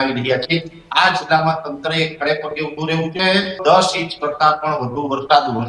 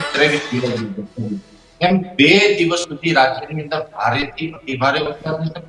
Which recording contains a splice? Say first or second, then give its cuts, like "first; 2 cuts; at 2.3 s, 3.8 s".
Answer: first; 1 cut; at 3.6 s